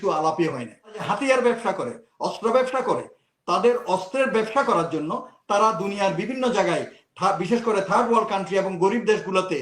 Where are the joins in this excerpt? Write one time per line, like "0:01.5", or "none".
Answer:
0:01.0